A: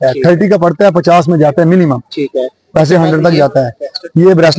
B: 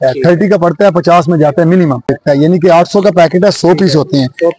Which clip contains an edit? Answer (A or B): B